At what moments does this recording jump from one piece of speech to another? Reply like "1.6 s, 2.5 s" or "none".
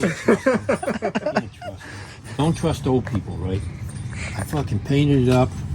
2.3 s